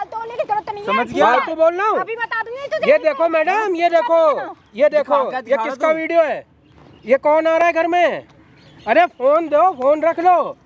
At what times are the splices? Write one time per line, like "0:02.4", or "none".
none